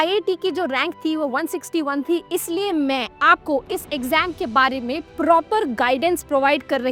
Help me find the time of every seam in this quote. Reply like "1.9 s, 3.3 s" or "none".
none